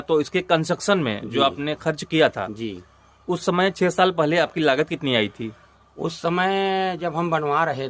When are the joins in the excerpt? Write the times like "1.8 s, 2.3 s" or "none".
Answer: none